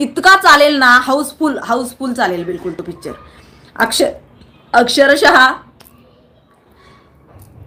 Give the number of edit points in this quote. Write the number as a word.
zero